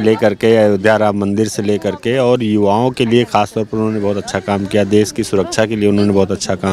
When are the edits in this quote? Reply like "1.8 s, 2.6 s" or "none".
none